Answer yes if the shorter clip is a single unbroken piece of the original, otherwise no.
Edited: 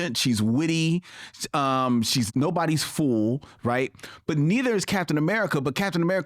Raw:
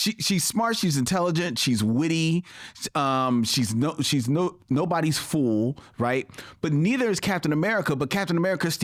no